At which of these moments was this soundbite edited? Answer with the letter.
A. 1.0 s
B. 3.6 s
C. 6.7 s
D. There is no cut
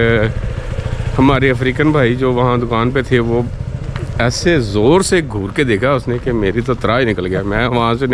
D